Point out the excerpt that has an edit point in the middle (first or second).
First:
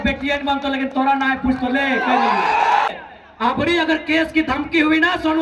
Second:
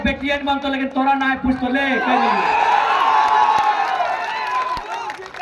first